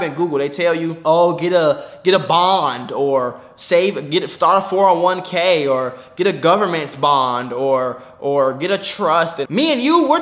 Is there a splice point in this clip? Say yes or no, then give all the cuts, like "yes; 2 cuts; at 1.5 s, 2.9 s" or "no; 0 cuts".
yes; 2 cuts; at 1.0 s, 9.4 s